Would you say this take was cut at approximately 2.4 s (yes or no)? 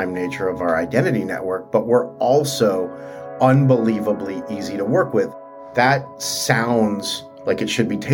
no